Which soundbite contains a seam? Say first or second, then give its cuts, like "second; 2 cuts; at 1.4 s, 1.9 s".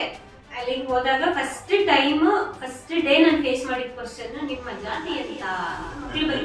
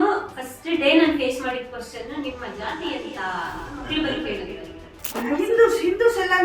second; 1 cut; at 5.1 s